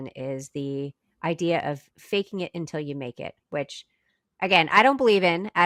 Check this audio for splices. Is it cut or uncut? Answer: uncut